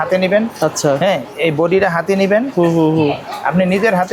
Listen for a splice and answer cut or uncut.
uncut